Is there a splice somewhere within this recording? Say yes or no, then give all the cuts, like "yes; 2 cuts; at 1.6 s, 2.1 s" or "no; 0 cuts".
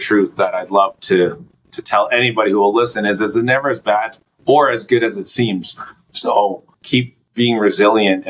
no; 0 cuts